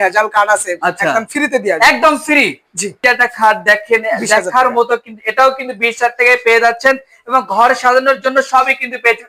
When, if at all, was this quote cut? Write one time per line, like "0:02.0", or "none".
none